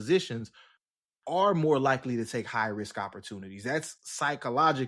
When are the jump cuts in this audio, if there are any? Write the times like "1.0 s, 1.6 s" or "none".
none